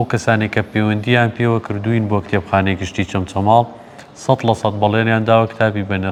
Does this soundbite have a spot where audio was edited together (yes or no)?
no